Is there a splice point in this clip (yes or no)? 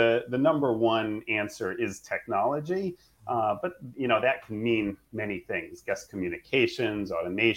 no